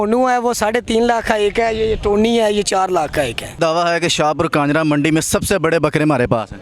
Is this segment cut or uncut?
cut